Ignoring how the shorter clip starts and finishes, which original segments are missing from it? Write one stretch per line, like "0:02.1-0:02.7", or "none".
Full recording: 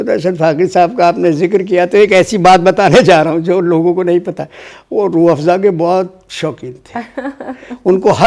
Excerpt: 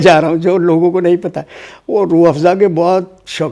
none